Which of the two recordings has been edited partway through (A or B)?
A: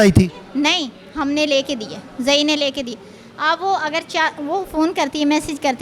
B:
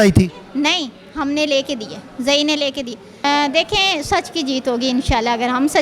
B